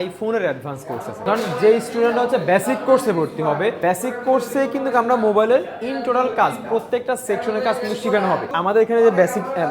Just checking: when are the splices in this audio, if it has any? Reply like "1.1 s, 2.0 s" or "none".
1.2 s, 3.8 s, 8.5 s